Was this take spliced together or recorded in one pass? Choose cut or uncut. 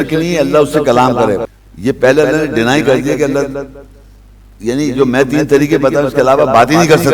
cut